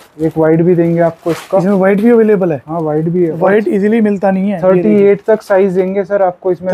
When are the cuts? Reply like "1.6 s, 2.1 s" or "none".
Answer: none